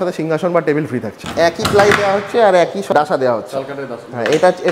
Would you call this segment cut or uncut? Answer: cut